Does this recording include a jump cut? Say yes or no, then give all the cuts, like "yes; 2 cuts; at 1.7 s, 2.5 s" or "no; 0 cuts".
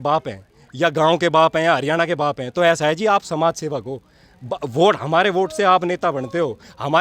no; 0 cuts